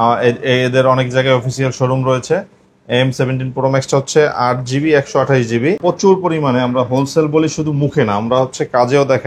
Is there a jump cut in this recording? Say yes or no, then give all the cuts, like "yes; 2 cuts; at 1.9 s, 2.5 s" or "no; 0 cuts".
yes; 1 cut; at 5.8 s